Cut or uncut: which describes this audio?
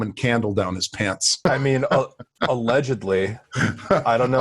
cut